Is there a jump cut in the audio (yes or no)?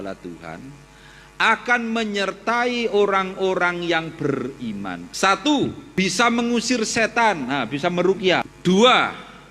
yes